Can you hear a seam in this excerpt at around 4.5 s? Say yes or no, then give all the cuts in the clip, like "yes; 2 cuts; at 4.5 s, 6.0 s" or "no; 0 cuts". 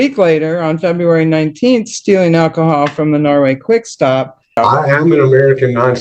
yes; 1 cut; at 4.5 s